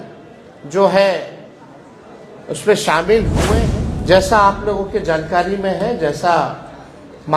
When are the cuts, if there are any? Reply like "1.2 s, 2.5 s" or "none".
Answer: 3.5 s